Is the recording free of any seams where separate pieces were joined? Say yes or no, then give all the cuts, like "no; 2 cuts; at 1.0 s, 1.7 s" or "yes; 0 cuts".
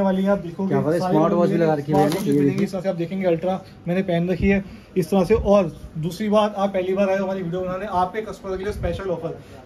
yes; 0 cuts